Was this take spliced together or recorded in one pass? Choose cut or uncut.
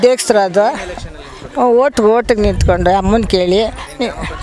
uncut